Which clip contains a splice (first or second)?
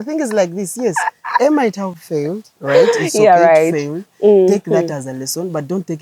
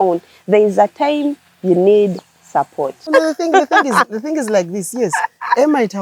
second